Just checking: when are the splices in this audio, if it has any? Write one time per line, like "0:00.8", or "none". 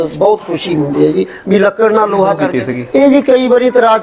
0:02.5